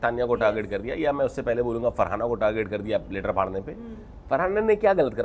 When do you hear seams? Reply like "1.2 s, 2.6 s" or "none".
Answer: none